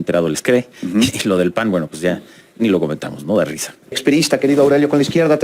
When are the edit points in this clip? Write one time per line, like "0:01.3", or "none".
0:04.0